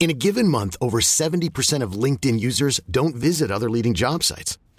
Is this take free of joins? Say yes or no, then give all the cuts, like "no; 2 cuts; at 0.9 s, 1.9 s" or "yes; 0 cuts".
yes; 0 cuts